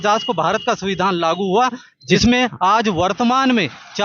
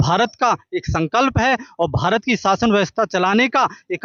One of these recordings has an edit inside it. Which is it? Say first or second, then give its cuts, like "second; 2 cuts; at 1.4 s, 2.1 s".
first; 1 cut; at 2.0 s